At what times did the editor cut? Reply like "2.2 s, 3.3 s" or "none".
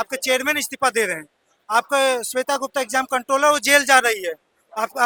none